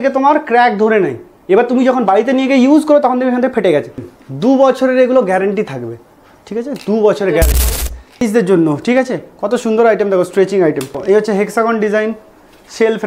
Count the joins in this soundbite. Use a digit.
3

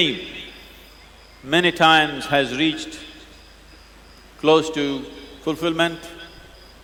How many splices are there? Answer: 0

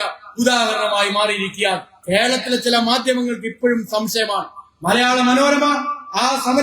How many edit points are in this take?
1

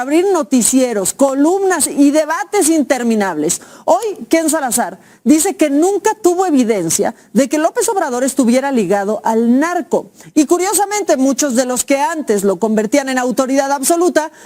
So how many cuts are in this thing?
0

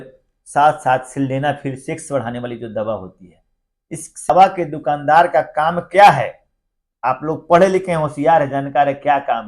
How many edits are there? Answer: 1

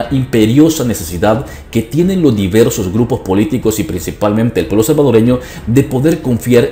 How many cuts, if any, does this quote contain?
0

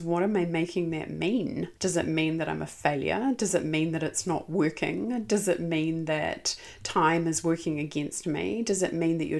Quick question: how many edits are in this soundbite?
1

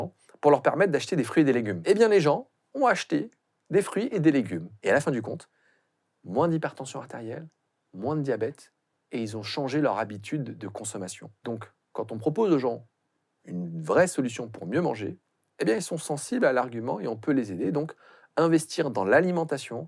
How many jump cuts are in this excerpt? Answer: 3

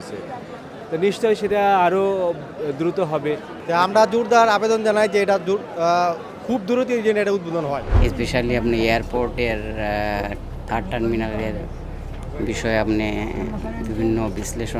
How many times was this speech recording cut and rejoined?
2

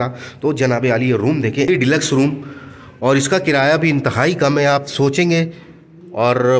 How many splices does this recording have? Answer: 1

